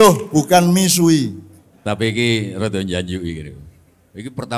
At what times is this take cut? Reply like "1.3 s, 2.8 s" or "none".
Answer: 1.7 s